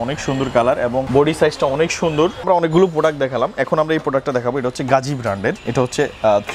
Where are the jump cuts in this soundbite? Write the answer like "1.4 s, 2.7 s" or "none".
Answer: 1.1 s, 2.4 s, 5.6 s

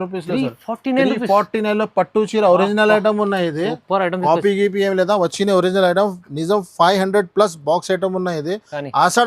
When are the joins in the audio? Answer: none

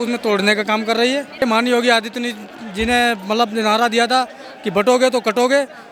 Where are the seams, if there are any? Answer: none

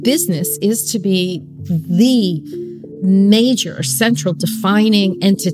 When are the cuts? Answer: none

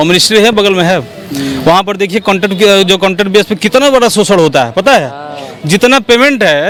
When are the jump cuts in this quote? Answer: none

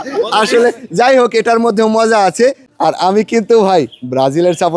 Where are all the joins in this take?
2.7 s

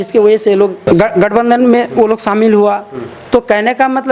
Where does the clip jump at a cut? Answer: none

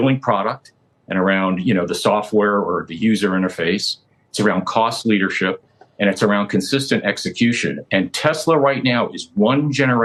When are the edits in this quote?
none

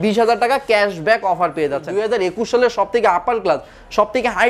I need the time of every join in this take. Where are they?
1.9 s

